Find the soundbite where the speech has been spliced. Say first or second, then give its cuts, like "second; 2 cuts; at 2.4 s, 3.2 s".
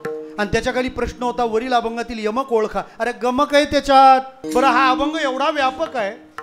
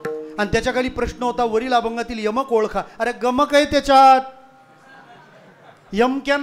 first; 1 cut; at 4.4 s